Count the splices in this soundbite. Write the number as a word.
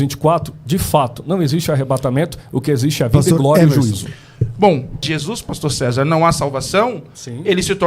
one